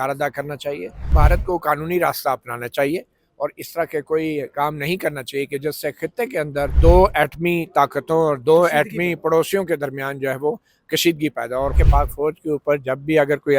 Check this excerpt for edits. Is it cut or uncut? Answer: cut